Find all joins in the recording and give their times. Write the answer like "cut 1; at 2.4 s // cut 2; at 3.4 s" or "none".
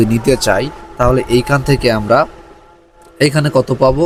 none